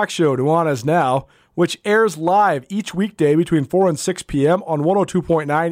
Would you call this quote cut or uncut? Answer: uncut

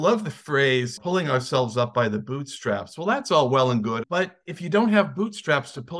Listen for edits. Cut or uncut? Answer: cut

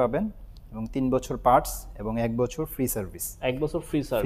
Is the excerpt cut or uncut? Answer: uncut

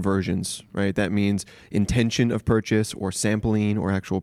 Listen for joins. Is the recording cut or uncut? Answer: uncut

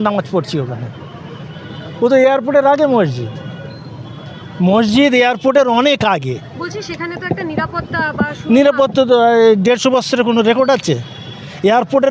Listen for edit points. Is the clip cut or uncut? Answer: uncut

